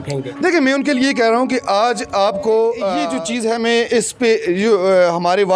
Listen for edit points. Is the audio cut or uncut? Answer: cut